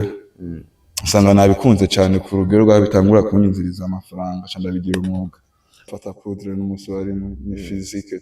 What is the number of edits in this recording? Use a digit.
1